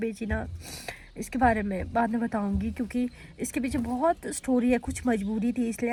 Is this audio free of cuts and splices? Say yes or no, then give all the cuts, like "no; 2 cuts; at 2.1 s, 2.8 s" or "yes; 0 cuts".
yes; 0 cuts